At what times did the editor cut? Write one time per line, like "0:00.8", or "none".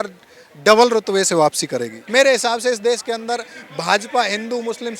0:02.0